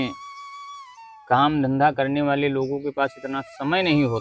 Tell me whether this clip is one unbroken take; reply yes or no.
yes